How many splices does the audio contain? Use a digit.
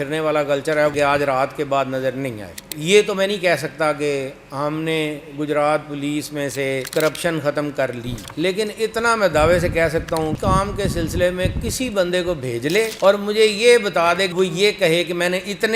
4